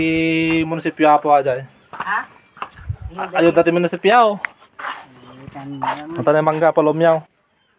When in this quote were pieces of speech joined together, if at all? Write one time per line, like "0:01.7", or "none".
none